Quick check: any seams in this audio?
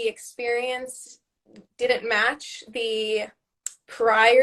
no; 0 cuts

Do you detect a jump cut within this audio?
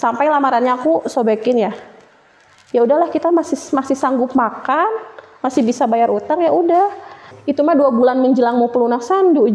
yes; 1 cut; at 7.3 s

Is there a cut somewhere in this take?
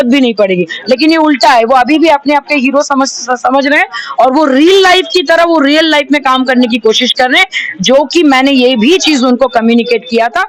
no; 0 cuts

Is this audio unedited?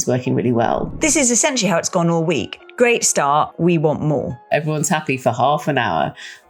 no; 4 cuts; at 0.9 s, 2.6 s, 3.5 s, 4.5 s

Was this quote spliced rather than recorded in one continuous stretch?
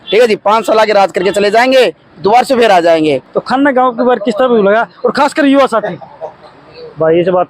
yes; 1 cut; at 3.3 s

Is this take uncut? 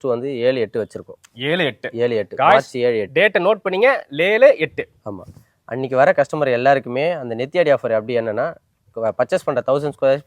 yes; 0 cuts

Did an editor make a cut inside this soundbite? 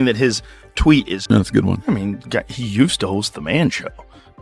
yes; 1 cut; at 1.2 s

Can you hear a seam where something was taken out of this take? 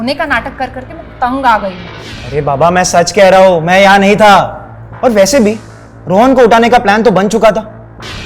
no; 0 cuts

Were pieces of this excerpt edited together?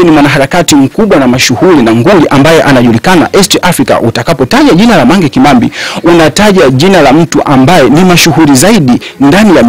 no; 0 cuts

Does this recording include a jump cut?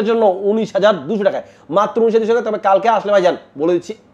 no; 0 cuts

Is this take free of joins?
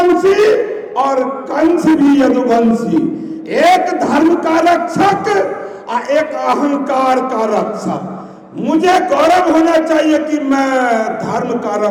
yes; 0 cuts

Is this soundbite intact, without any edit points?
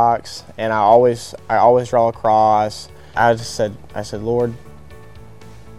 no; 1 cut; at 3.1 s

